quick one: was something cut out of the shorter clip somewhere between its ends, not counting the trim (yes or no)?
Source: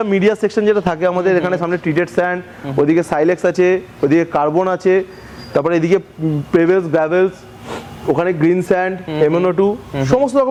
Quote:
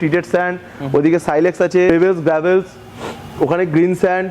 yes